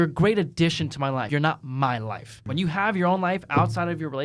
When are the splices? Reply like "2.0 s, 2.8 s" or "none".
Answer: 1.3 s, 2.4 s